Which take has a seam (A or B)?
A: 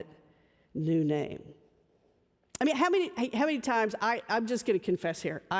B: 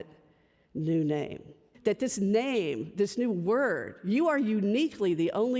B